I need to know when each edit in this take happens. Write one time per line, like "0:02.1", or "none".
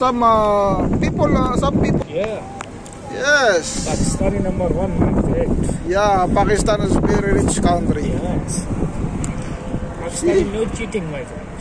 0:02.0

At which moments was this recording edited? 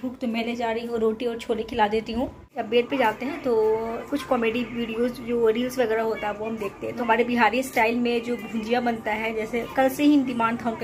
0:02.5
0:04.1
0:07.0
0:09.5

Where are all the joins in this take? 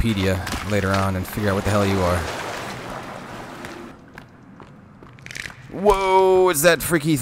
0:03.9

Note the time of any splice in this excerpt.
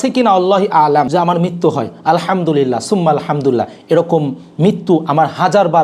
0:01.1

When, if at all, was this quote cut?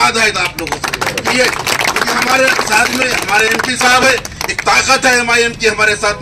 0:03.2

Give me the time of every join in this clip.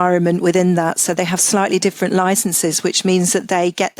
none

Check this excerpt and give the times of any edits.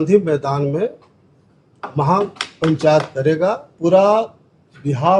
0:03.7

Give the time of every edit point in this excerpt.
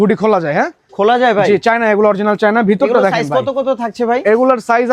none

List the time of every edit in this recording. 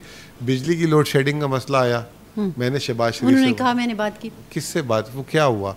none

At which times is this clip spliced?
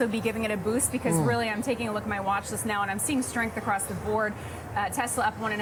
none

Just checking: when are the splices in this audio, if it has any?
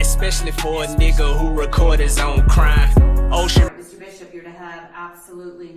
0:03.7

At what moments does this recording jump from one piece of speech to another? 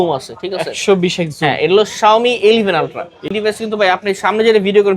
0:03.4

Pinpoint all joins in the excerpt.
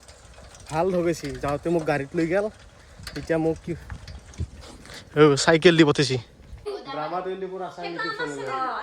0:06.8

